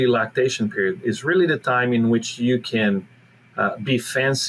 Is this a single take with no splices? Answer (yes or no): yes